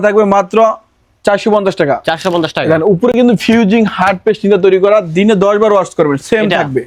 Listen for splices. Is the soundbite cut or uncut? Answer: uncut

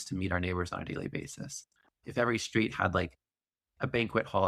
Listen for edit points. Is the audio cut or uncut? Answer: uncut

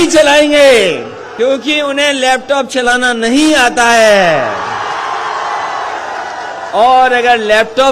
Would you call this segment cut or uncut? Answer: cut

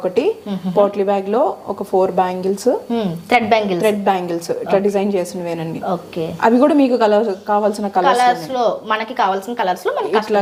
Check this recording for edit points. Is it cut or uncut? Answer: uncut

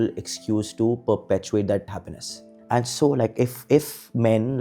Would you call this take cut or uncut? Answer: cut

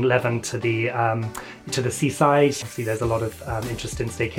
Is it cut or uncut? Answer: cut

